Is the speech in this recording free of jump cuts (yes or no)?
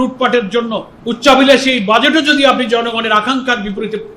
no